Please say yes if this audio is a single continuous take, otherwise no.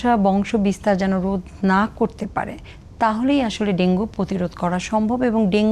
yes